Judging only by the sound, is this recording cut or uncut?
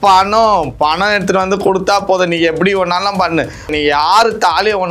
cut